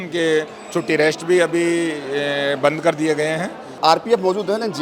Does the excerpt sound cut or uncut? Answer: cut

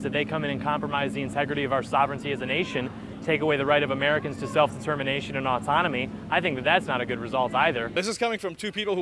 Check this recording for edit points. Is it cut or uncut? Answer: cut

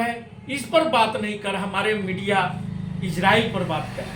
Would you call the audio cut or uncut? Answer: uncut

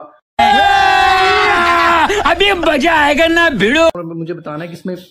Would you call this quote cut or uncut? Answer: cut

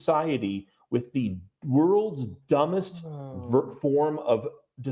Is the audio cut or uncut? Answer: uncut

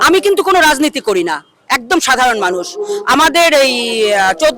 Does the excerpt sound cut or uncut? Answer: uncut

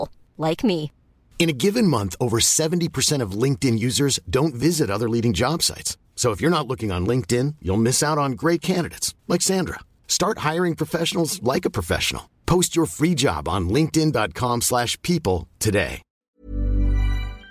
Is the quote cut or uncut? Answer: cut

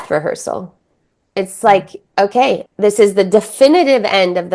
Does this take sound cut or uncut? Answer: cut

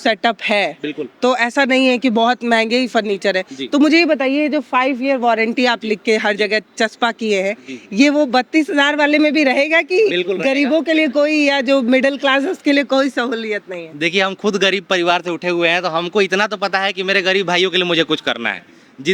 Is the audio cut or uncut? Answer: uncut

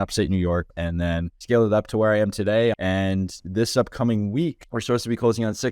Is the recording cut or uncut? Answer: cut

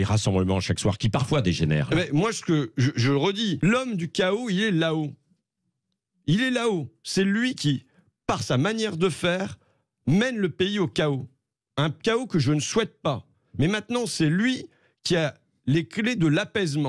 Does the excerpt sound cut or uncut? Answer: cut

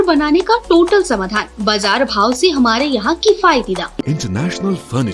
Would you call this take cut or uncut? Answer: cut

